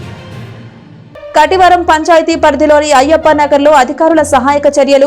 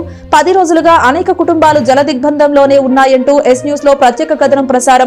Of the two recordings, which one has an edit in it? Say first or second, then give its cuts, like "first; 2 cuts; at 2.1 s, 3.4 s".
first; 1 cut; at 1.0 s